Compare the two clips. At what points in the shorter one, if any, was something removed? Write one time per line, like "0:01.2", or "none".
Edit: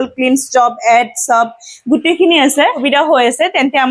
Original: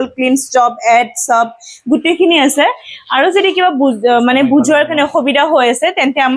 0:02.8